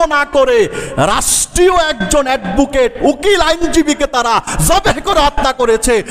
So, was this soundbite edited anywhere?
no; 0 cuts

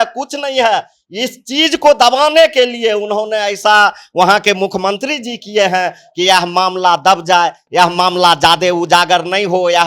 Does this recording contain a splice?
no; 0 cuts

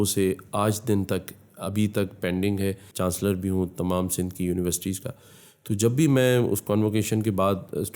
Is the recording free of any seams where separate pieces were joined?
no; 1 cut; at 2.9 s

